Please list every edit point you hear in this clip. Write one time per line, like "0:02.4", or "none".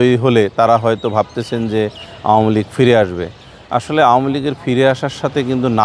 none